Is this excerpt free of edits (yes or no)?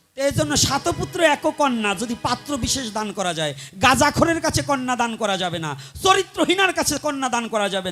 yes